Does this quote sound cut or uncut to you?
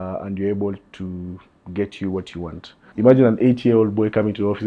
cut